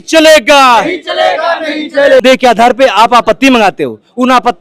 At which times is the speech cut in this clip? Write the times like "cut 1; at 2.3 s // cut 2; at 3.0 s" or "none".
cut 1; at 2.2 s